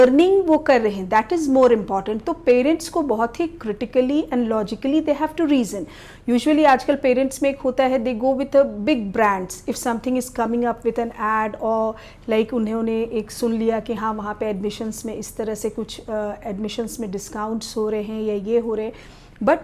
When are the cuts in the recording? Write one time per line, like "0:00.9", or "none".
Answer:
none